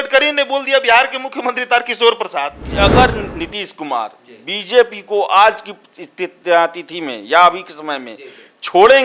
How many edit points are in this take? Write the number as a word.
one